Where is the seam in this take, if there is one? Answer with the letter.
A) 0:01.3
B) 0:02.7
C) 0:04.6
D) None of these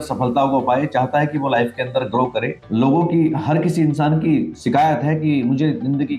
B